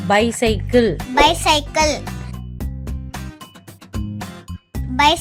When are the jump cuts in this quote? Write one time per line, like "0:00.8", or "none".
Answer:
none